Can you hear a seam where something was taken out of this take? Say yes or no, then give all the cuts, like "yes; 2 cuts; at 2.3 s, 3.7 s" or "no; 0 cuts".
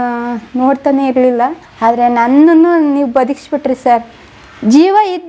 yes; 1 cut; at 1.6 s